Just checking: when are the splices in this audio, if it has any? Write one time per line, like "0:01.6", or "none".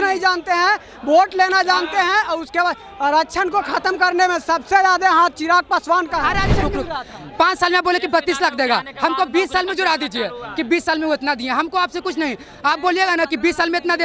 0:06.6